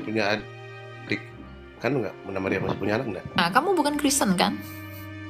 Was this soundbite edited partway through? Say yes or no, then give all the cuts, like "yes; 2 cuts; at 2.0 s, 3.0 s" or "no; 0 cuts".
yes; 1 cut; at 3.4 s